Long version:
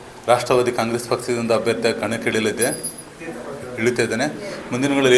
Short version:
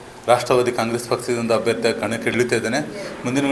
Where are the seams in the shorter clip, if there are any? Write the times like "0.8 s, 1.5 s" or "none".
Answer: 2.3 s